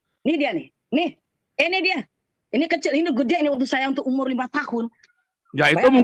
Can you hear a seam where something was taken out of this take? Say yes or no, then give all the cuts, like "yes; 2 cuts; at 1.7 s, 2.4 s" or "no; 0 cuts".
no; 0 cuts